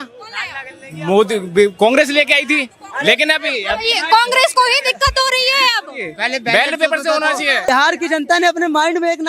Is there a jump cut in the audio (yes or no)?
yes